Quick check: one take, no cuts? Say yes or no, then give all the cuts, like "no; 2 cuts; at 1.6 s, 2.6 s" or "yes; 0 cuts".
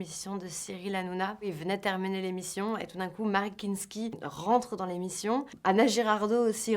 no; 2 cuts; at 1.5 s, 5.5 s